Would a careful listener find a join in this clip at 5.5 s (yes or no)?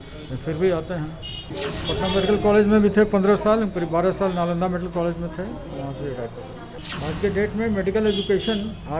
no